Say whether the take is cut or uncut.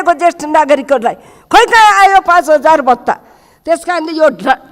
uncut